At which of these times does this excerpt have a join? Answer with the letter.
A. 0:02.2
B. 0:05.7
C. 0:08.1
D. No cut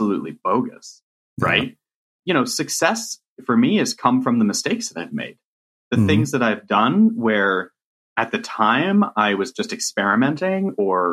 A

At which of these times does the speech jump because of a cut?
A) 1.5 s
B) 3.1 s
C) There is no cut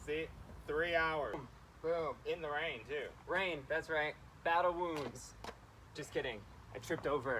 A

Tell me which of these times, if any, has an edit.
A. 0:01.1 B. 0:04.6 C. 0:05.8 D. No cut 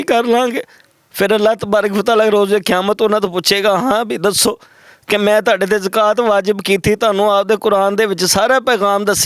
D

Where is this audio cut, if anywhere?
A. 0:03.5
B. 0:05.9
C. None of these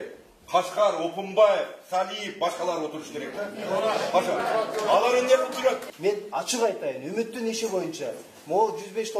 B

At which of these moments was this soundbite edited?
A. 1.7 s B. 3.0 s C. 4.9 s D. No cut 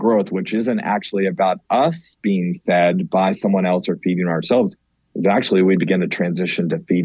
D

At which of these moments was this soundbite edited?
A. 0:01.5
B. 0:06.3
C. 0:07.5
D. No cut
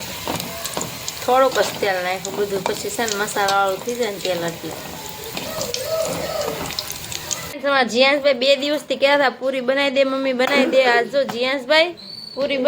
C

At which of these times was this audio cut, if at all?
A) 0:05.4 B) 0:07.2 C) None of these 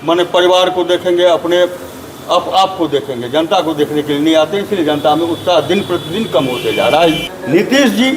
B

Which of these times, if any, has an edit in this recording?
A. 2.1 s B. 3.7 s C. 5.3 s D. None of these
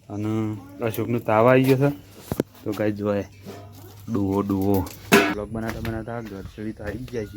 C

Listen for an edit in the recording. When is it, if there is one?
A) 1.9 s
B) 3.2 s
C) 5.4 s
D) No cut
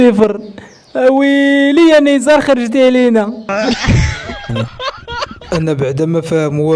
C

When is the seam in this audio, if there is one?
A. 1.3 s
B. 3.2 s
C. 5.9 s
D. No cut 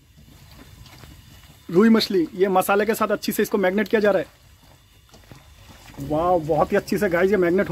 C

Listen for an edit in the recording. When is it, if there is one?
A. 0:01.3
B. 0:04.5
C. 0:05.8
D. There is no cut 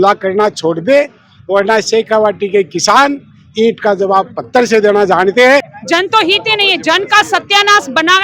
C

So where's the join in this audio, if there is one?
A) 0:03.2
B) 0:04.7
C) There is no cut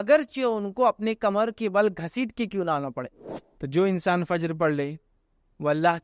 A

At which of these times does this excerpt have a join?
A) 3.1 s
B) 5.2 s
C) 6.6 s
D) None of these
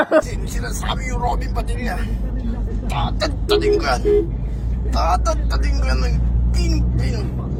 D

